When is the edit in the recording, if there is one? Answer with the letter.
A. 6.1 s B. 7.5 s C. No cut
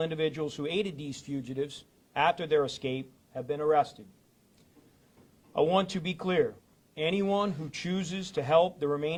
C